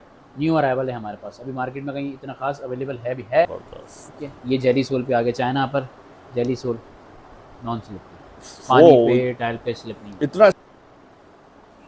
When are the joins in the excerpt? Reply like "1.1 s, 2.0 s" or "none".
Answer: 3.5 s, 10.6 s